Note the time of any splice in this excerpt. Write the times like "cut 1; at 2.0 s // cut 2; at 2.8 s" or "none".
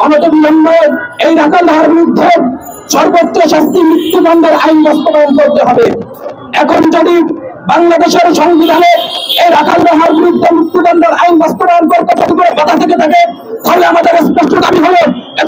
none